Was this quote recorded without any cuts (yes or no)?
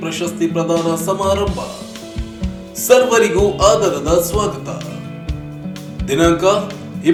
yes